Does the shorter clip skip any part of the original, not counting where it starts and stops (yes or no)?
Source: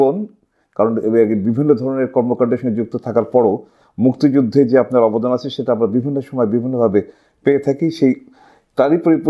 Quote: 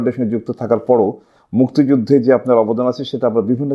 no